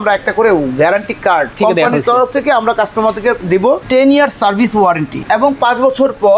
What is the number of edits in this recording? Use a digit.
3